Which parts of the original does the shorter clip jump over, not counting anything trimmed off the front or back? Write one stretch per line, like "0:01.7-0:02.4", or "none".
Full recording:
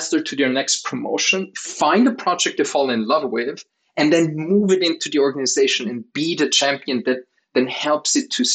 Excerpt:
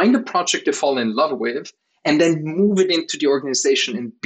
none